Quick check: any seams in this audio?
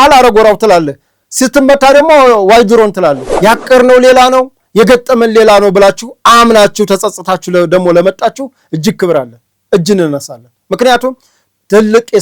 yes; 1 cut; at 3.3 s

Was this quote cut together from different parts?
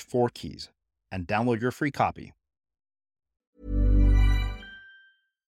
yes; 1 cut; at 3.6 s

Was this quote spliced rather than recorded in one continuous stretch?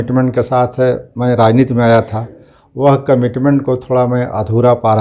no; 0 cuts

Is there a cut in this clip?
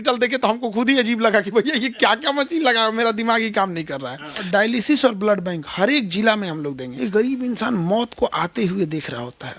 yes; 2 cuts; at 4.4 s, 6.9 s

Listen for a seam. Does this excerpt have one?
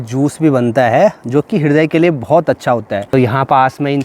yes; 1 cut; at 3.1 s

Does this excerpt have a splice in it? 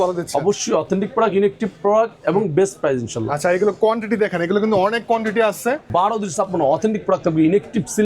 yes; 1 cut; at 5.8 s

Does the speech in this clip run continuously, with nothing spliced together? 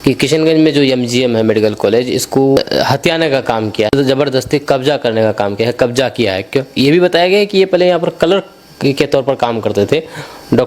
no; 2 cuts; at 2.6 s, 3.9 s

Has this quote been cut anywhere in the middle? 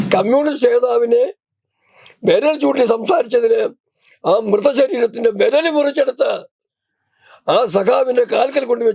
no; 0 cuts

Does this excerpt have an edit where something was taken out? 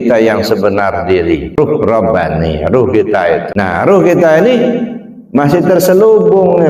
yes; 2 cuts; at 1.6 s, 3.5 s

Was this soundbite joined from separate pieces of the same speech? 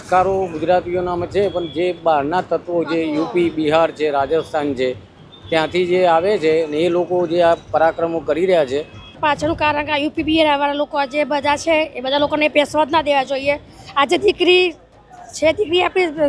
yes; 1 cut; at 9.2 s

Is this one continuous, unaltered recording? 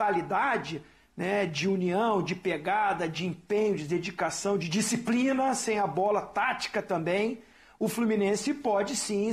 yes; 0 cuts

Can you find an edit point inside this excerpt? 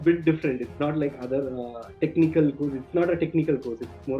no; 0 cuts

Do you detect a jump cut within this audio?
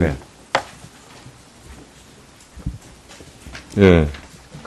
no; 0 cuts

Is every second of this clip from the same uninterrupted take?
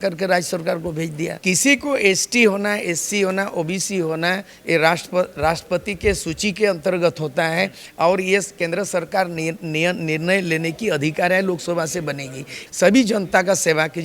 yes; 0 cuts

